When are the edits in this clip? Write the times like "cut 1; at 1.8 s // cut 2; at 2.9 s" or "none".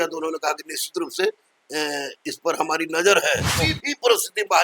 cut 1; at 3.6 s